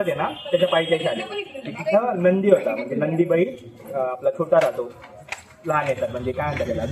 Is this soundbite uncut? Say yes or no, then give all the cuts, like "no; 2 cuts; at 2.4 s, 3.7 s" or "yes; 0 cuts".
yes; 0 cuts